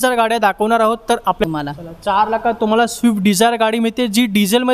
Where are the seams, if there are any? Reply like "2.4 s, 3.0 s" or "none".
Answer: 1.4 s